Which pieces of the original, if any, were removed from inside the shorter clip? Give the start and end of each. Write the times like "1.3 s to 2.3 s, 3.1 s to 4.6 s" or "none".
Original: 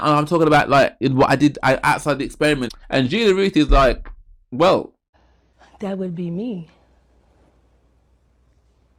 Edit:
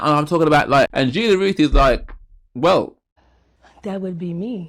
0.9 s to 2.9 s